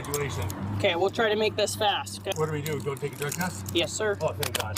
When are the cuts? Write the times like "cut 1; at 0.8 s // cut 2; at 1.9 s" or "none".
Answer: cut 1; at 2.3 s